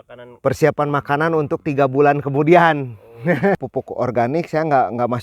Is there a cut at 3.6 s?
yes; 1 cut; at 3.6 s

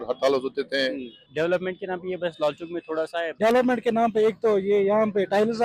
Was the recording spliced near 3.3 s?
yes; 2 cuts; at 1.1 s, 3.3 s

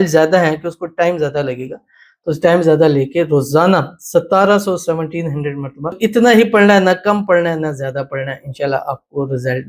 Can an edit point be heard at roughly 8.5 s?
no; 1 cut; at 6.0 s

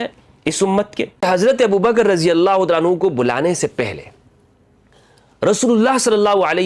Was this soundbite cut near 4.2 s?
no; 1 cut; at 1.2 s

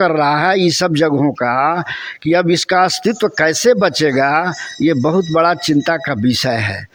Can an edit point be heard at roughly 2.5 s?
no; 0 cuts

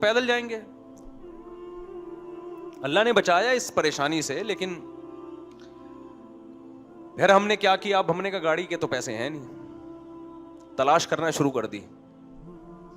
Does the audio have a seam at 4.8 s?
yes; 5 cuts; at 1.1 s, 2.8 s, 4.8 s, 6.7 s, 11.9 s

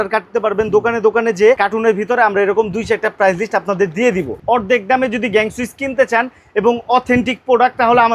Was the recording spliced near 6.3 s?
no; 2 cuts; at 1.6 s, 4.4 s

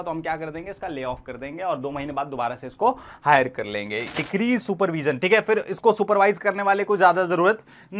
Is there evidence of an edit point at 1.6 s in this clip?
no; 1 cut; at 4.1 s

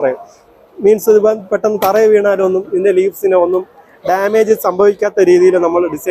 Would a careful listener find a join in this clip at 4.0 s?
no; 0 cuts

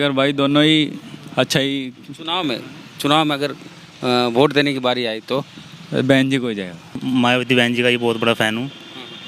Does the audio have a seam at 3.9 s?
no; 1 cut; at 6.9 s

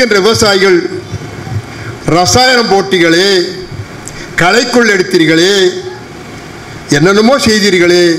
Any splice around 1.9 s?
no; 0 cuts

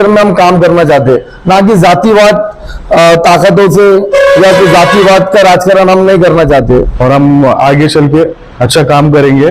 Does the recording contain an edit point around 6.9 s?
yes; 1 cut; at 6.9 s

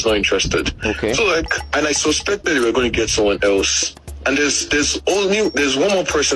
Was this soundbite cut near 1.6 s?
yes; 1 cut; at 1.6 s

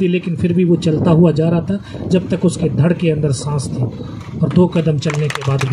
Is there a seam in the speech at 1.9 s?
no; 0 cuts

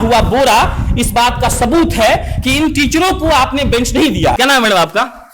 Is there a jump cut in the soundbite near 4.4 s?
yes; 1 cut; at 4.4 s

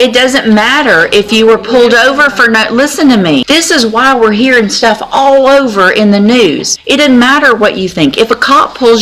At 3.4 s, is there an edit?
yes; 2 cuts; at 3.4 s, 6.7 s

